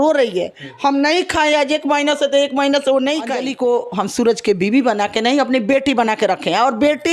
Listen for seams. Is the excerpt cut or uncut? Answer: cut